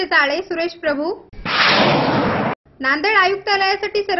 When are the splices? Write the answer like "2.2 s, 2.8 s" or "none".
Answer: none